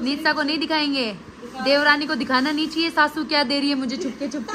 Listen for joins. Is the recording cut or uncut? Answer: uncut